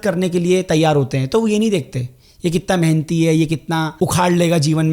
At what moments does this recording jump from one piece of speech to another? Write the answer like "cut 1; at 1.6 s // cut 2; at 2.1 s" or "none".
cut 1; at 3.9 s